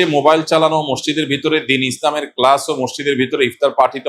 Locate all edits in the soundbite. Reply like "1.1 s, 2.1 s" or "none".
none